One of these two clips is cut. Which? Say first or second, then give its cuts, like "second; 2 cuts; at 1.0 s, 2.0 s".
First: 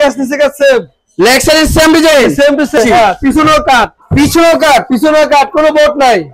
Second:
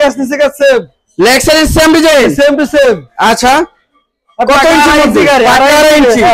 first; 1 cut; at 2.8 s